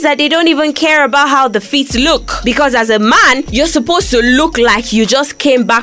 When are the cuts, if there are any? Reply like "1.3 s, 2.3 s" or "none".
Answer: 2.3 s, 3.4 s